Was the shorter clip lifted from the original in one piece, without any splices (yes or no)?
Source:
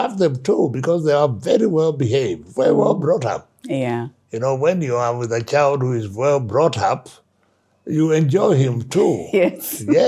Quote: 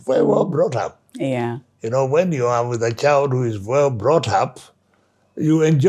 yes